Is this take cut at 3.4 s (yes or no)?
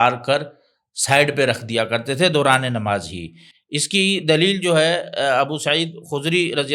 no